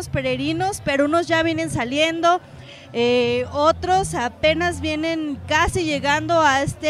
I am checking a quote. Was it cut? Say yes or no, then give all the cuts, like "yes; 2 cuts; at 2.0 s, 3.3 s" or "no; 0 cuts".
no; 0 cuts